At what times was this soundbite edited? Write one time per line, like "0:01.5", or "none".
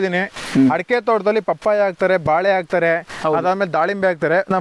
none